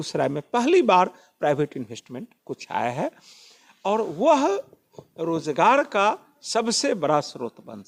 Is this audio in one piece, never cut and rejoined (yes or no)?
yes